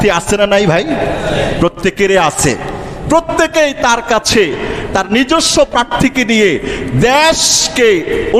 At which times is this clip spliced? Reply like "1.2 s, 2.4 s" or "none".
none